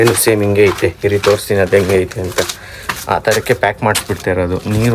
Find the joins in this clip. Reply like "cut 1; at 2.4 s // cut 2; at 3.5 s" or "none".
none